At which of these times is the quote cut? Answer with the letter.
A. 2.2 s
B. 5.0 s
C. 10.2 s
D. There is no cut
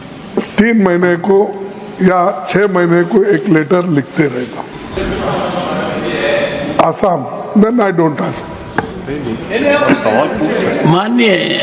B